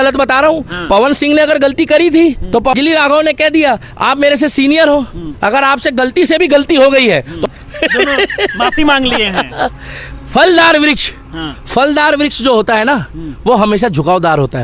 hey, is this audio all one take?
no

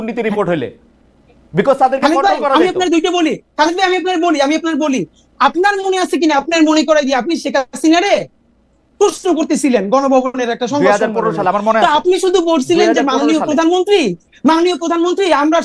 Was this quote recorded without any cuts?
yes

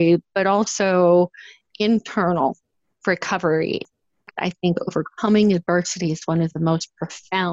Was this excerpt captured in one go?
no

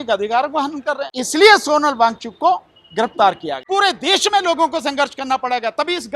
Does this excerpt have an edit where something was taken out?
yes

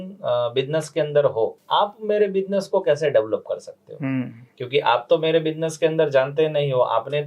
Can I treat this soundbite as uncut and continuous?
no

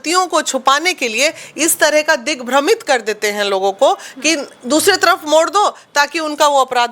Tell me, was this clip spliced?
no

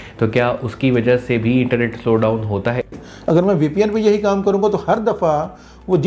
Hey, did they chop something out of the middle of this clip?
yes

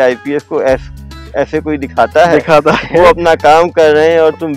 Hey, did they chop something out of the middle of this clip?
no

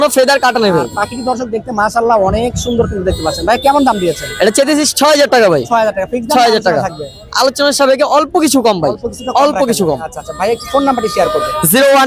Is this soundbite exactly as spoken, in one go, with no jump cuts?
yes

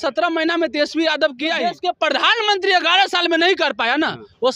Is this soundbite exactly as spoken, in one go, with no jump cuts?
no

